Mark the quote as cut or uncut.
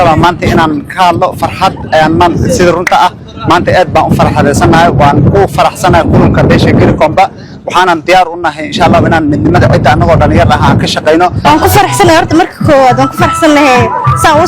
cut